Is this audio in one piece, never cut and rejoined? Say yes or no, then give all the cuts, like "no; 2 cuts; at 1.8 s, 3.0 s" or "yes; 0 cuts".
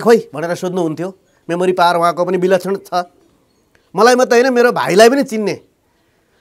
yes; 0 cuts